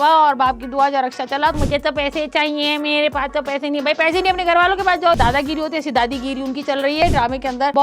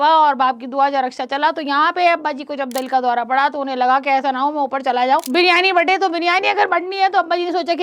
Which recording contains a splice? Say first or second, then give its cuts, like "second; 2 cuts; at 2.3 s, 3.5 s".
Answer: first; 3 cuts; at 1.6 s, 5.2 s, 7.0 s